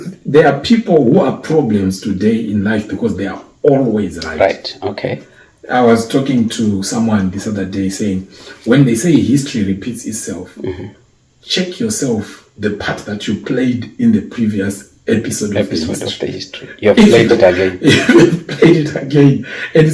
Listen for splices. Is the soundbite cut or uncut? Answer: uncut